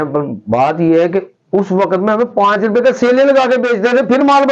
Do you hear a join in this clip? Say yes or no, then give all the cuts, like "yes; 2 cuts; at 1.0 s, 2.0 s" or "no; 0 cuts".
no; 0 cuts